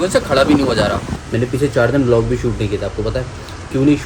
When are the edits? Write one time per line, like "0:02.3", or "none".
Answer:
0:01.1